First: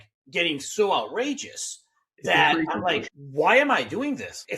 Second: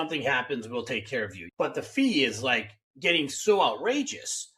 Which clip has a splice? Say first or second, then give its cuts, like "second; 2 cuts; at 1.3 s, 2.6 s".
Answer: first; 1 cut; at 3.0 s